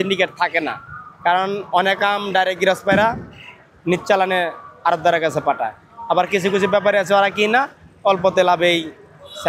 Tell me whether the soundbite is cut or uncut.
uncut